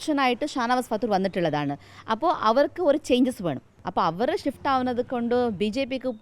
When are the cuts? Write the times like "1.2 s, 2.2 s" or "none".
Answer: 3.8 s